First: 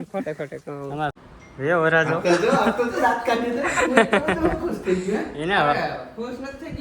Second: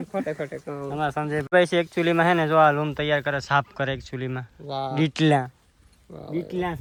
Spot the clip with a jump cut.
first; 1 cut; at 1.1 s

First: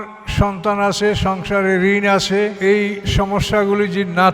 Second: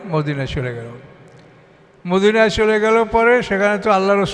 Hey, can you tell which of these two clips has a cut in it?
first; 1 cut; at 3.0 s

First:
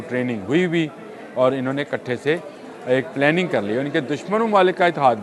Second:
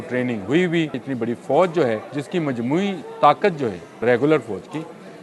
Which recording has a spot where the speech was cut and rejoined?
second; 3 cuts; at 1.0 s, 2.1 s, 4.0 s

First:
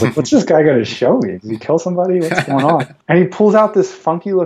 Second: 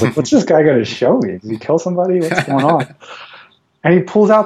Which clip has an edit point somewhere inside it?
first; 1 cut; at 2.9 s

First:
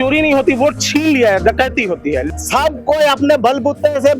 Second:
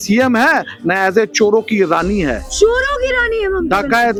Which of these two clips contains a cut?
first; 1 cut; at 2.2 s

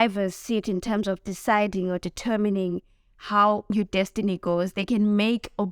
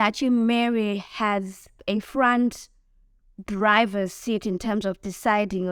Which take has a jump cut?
first; 1 cut; at 3.6 s

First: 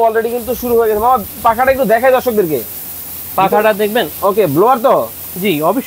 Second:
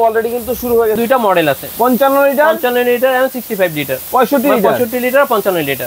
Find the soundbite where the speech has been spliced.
second; 1 cut; at 1.0 s

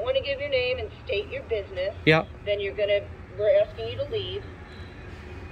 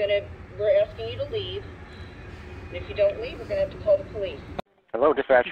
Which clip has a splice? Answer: second; 1 cut; at 4.5 s

